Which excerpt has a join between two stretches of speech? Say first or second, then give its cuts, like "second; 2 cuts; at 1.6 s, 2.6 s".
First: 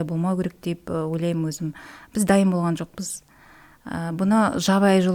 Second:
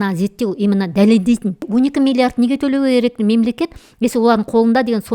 second; 1 cut; at 1.7 s